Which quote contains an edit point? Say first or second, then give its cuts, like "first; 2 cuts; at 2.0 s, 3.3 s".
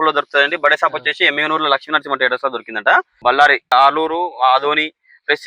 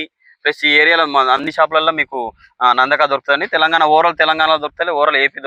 first; 1 cut; at 3.2 s